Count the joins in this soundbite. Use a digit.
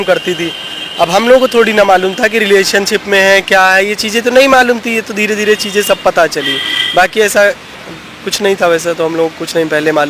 0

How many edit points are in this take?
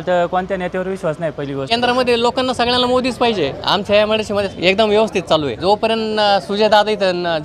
4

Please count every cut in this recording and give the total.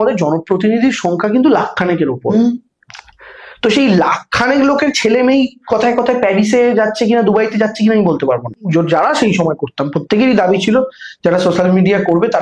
1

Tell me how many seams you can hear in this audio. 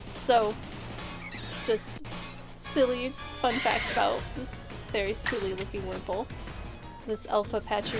1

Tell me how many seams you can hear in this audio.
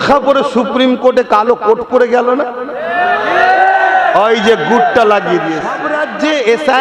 1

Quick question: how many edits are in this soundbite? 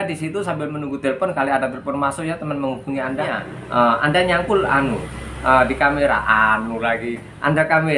1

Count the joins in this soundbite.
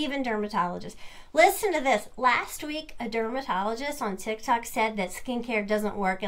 0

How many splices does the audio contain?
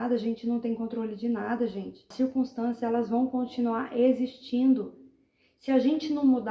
1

